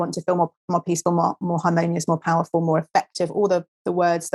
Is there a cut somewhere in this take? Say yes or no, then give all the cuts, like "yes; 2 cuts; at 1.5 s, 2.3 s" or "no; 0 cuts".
no; 0 cuts